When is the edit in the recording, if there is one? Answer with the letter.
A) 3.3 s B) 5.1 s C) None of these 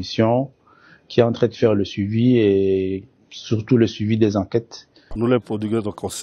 B